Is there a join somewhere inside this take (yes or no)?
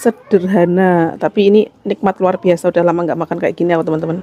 no